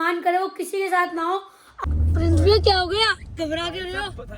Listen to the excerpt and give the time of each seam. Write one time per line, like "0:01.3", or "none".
0:01.8